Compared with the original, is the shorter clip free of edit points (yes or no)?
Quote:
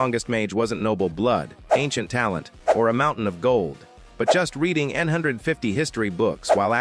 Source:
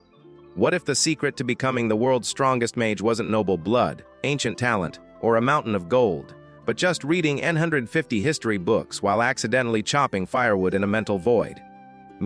yes